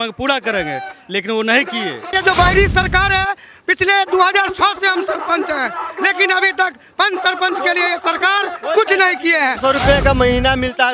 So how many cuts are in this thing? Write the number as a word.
two